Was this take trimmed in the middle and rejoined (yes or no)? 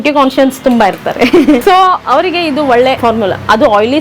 yes